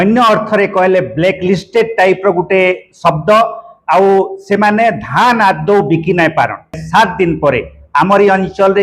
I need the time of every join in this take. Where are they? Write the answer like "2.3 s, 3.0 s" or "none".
6.8 s